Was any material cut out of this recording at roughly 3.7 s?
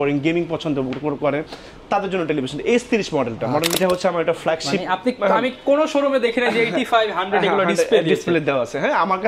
yes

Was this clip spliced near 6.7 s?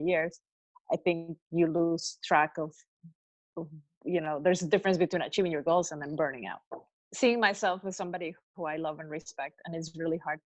yes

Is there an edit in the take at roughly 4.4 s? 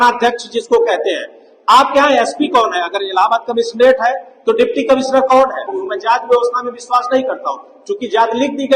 no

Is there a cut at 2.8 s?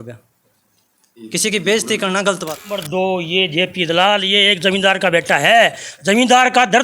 yes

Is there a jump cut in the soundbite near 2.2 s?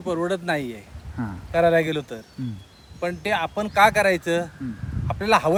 no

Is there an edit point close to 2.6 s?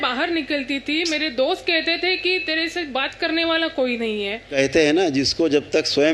no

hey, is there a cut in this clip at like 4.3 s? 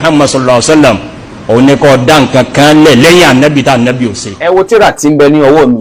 yes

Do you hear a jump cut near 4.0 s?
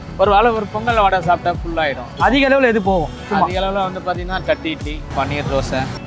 no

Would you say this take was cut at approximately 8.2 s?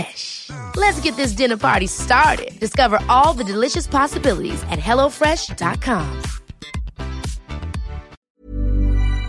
yes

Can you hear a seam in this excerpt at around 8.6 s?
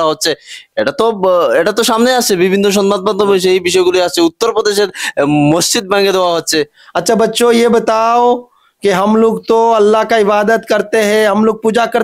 no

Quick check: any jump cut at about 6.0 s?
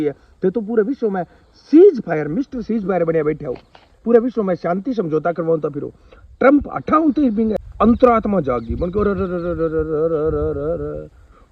no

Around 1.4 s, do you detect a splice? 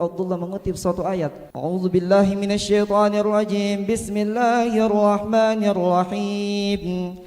yes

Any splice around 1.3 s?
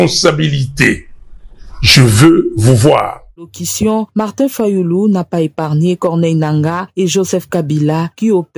no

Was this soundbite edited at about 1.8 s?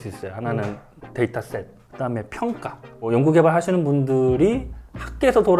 yes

